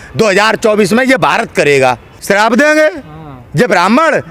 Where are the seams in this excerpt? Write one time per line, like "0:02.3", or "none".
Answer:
0:02.1